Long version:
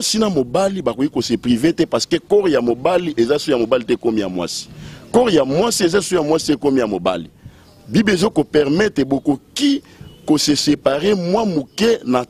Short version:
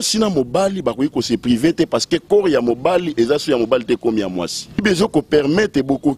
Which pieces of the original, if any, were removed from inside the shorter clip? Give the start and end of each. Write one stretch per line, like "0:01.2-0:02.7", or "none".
0:04.8-0:08.0